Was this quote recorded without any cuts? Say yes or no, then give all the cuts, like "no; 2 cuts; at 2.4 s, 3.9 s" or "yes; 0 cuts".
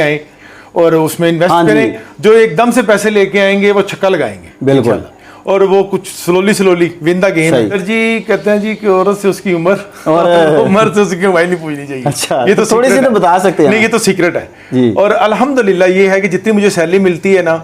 no; 1 cut; at 7.8 s